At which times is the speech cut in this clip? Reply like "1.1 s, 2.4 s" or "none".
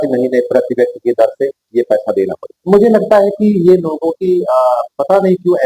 2.5 s